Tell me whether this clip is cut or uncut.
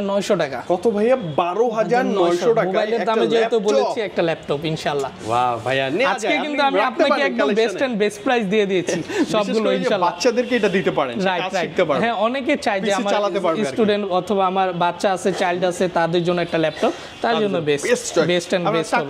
uncut